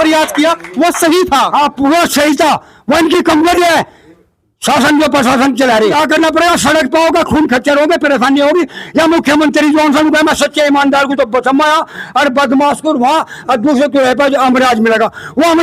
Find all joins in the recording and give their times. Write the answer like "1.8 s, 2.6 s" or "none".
5.9 s